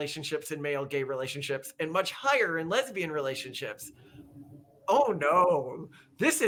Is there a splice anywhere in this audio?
no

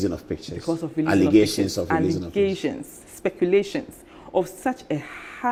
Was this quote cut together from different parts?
no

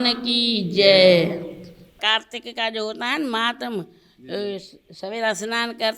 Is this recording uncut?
no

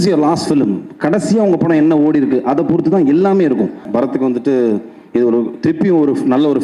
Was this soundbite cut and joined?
yes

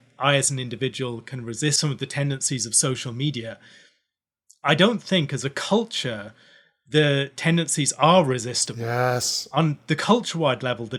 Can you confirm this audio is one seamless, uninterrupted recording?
yes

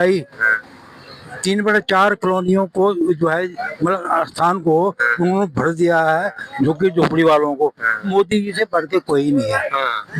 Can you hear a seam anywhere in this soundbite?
yes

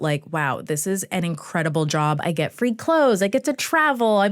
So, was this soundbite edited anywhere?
yes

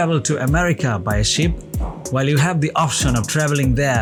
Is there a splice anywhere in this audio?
no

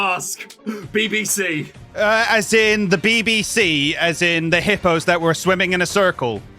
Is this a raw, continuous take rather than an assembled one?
no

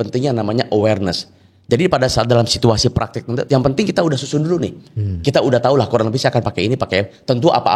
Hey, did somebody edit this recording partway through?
no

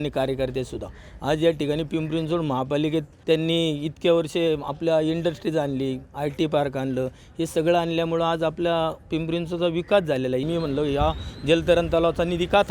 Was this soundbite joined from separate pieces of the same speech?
yes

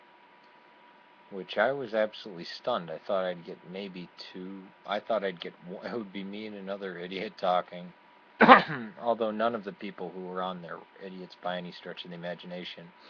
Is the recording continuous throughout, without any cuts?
yes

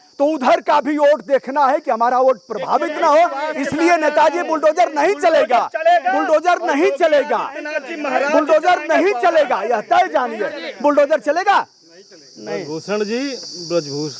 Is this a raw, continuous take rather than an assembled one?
yes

